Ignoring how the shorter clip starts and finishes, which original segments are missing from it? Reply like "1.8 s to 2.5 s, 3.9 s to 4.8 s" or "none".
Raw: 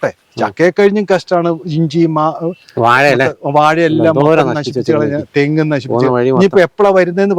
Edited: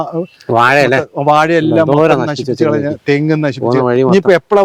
none